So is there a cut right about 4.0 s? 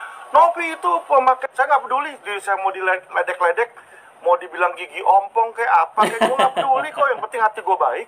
no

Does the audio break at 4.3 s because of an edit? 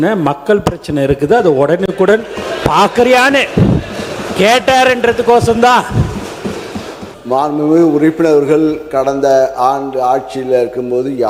no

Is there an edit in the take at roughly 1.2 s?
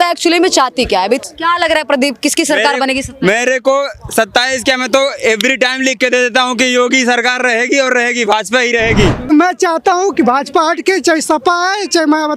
yes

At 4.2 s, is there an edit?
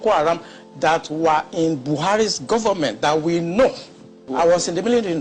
yes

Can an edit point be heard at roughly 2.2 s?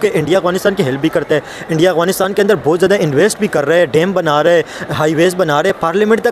no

